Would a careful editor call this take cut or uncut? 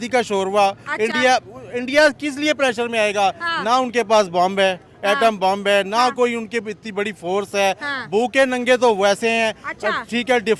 uncut